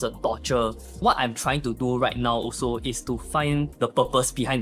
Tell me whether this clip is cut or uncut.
cut